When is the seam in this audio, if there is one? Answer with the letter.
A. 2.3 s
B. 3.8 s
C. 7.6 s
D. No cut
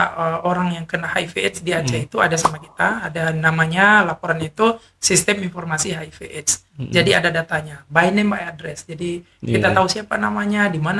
D